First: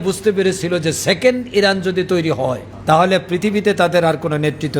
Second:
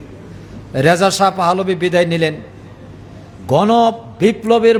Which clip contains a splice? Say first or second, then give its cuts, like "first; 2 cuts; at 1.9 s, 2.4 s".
first; 1 cut; at 2.7 s